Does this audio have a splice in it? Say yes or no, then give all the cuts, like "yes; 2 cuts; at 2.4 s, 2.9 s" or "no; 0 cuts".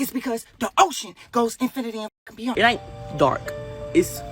yes; 1 cut; at 2.5 s